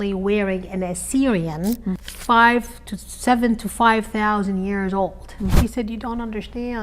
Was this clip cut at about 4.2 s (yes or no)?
no